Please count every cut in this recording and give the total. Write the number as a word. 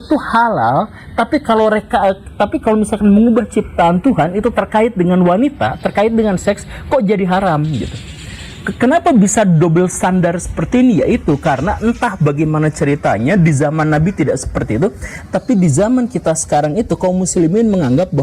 zero